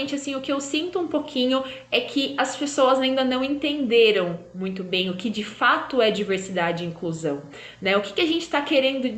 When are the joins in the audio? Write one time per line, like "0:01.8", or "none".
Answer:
none

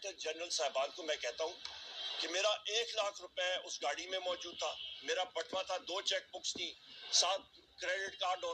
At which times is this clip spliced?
none

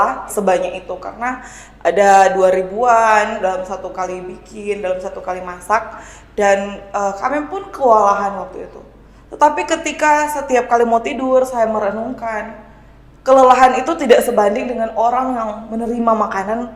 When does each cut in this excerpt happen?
none

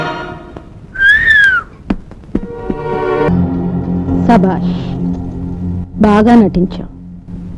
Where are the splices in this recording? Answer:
0:03.3

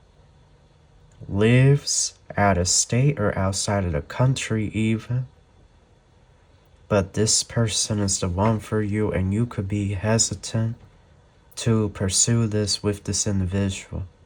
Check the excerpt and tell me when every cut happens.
none

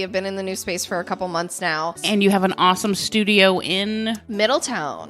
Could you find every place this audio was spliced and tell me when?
0:02.0

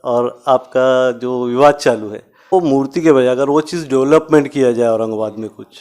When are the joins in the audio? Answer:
0:02.5

